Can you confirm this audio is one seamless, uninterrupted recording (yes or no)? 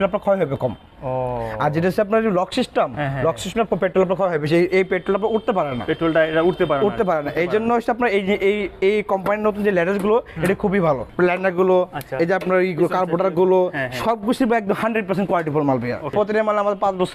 no